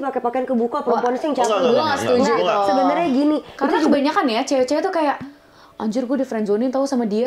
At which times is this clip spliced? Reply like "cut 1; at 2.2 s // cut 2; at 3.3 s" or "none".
cut 1; at 3.9 s